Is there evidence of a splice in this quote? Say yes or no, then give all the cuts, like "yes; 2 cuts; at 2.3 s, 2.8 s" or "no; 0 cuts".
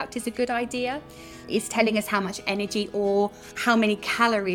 yes; 2 cuts; at 1.4 s, 3.5 s